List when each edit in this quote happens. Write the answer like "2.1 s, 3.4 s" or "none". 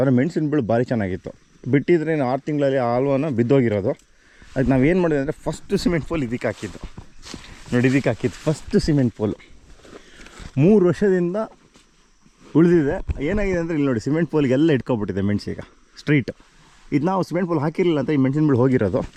none